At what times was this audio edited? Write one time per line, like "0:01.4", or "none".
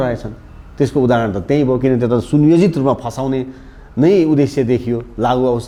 none